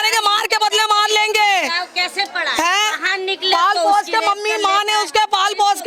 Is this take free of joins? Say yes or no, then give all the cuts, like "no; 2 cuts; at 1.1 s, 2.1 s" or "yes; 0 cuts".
yes; 0 cuts